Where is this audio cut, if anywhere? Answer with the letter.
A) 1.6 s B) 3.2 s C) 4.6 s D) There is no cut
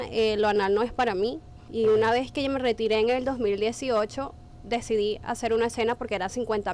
A